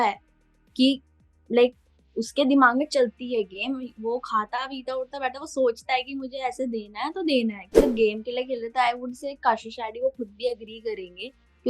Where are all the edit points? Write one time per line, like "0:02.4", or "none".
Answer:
0:07.7

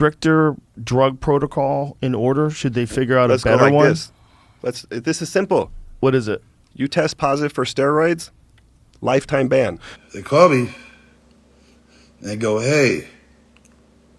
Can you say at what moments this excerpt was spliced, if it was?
0:09.9

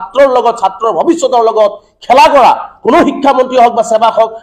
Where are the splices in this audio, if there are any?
none

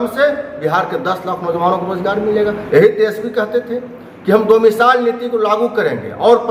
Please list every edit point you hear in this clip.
none

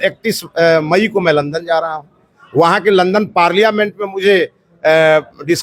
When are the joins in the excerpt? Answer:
none

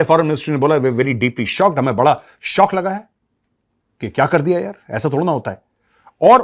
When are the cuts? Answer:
none

